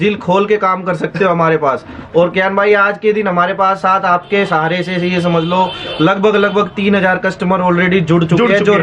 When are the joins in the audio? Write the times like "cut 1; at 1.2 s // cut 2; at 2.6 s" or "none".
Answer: none